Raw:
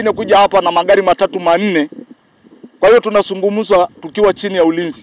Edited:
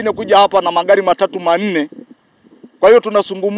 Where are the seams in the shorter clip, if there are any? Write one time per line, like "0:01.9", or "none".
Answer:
none